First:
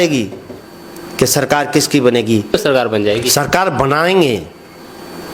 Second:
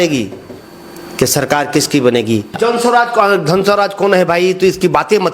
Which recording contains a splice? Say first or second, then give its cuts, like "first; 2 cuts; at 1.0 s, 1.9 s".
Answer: second; 1 cut; at 2.5 s